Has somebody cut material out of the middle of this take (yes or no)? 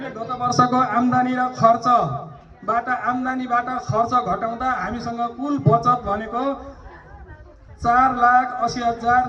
no